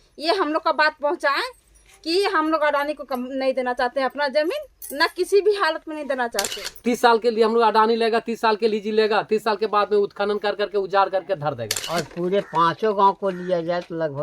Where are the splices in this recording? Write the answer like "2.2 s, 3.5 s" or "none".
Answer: 6.6 s, 11.7 s

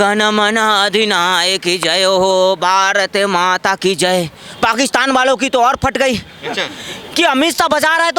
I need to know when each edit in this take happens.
none

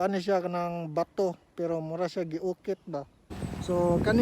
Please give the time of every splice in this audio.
3.3 s

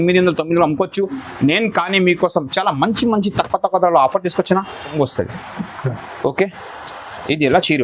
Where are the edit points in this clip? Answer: 4.9 s

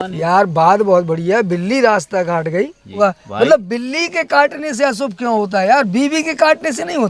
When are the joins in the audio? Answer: 3.0 s

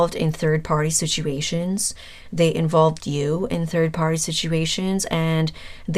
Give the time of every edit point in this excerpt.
none

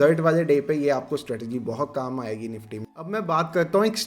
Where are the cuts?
3.0 s

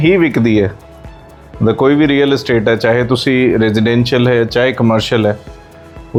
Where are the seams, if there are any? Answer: none

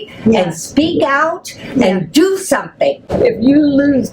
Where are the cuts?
3.0 s

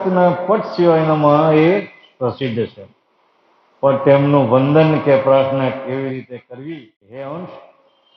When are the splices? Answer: 6.5 s

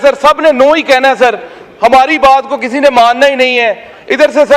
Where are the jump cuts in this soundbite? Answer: none

